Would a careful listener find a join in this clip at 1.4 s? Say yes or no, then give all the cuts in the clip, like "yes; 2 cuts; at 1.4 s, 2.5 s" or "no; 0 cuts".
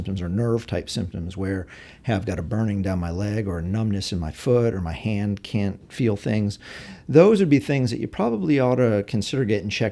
no; 0 cuts